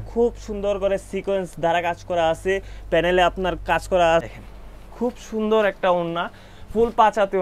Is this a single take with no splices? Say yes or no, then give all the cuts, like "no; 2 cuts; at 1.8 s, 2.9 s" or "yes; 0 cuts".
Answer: no; 1 cut; at 4.3 s